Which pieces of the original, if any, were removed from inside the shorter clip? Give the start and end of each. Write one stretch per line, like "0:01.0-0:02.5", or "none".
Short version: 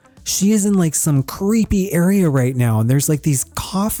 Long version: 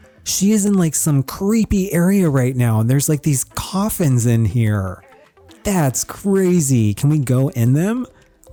none